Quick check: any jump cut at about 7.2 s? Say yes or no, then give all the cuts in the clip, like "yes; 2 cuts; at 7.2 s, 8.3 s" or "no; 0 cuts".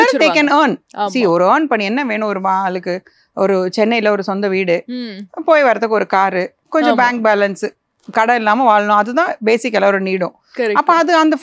no; 0 cuts